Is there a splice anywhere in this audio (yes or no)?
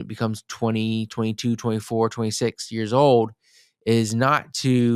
no